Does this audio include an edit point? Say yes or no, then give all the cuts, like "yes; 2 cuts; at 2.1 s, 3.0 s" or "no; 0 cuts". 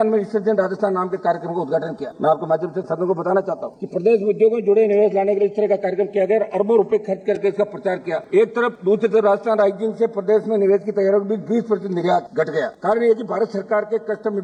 no; 0 cuts